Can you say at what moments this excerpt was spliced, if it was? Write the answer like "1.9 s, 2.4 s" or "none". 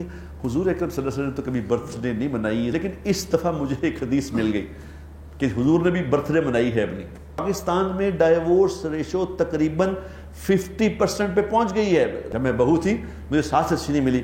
2.7 s, 7.4 s, 12.2 s